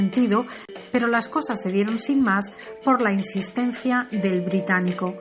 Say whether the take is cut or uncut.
uncut